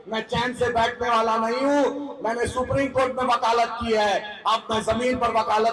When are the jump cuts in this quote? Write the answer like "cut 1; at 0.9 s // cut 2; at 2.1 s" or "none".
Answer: none